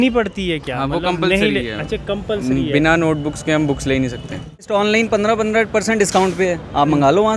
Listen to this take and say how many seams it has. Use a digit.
1